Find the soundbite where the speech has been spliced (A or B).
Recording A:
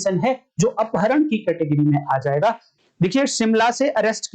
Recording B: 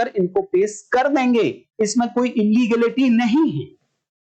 A